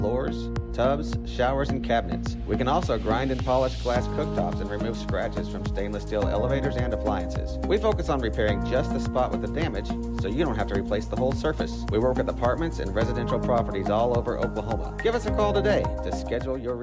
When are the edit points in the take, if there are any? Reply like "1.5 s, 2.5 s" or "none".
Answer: none